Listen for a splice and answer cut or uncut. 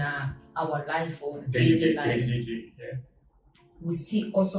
uncut